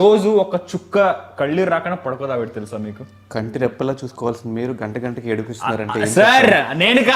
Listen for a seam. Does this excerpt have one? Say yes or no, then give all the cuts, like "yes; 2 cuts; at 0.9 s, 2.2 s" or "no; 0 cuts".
no; 0 cuts